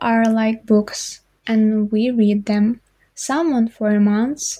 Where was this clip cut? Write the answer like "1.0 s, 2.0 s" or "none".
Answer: none

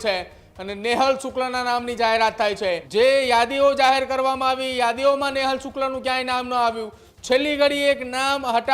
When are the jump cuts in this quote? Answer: 2.8 s

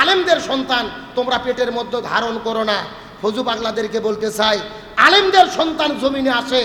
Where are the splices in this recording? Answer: none

